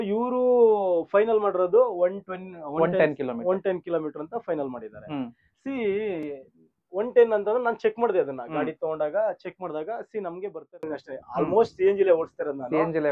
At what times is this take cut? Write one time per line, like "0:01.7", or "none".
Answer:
0:10.7